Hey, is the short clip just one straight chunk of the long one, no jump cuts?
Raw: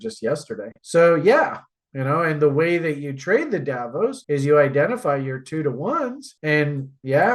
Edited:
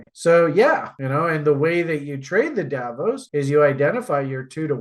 no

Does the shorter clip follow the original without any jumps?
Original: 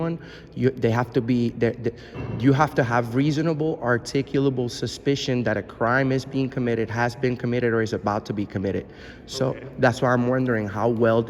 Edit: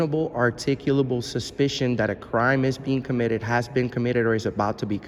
yes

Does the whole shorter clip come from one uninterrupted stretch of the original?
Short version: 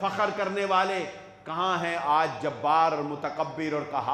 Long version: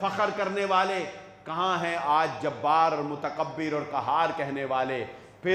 yes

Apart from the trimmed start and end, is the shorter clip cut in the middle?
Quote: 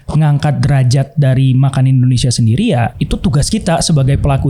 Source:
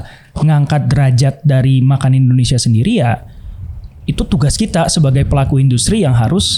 yes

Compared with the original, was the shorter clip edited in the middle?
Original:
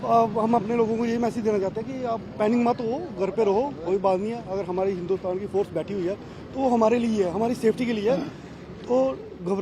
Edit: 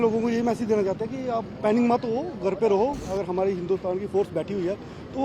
yes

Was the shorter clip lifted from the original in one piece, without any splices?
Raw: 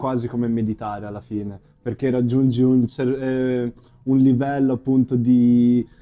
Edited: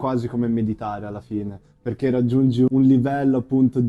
no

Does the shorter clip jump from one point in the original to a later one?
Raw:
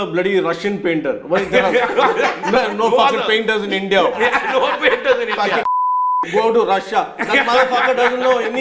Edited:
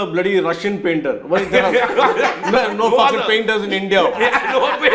no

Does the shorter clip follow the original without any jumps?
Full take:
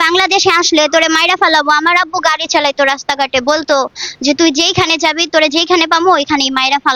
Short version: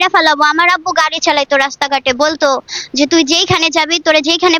yes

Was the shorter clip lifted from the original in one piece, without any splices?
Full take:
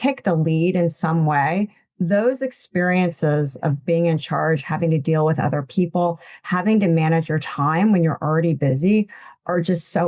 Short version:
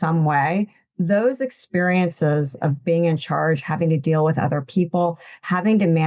yes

